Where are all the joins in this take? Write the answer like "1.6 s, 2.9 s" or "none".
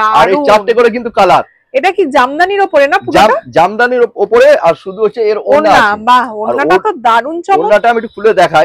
none

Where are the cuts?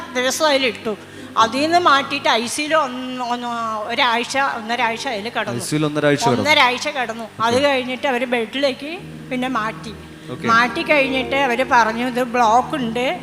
none

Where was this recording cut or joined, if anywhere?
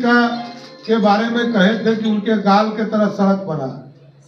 none

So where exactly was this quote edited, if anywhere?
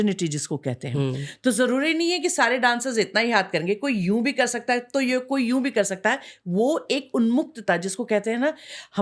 none

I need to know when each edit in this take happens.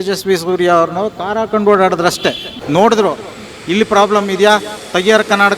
2.5 s

